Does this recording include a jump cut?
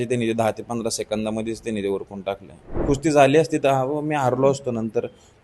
yes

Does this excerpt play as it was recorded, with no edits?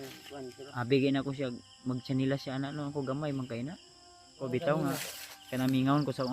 no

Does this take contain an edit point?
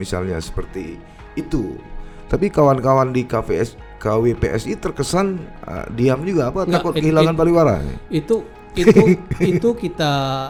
no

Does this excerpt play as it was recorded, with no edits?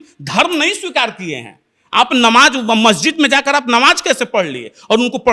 yes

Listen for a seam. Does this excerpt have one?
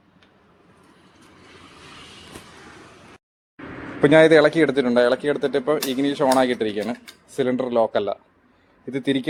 no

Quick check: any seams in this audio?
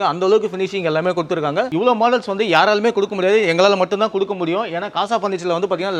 no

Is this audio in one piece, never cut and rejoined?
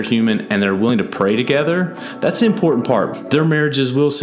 no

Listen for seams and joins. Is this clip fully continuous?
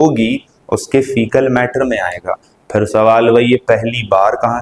yes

